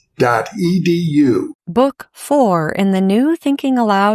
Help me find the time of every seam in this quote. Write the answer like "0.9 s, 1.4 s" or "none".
1.6 s